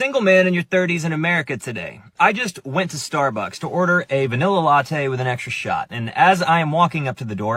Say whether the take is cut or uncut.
uncut